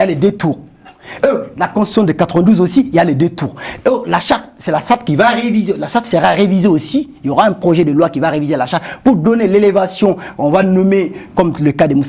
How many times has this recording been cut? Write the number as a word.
zero